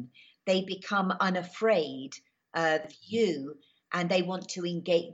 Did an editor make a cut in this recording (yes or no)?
yes